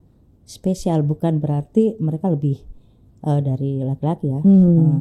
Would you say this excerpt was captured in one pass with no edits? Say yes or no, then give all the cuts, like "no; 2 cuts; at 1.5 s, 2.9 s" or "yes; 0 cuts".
yes; 0 cuts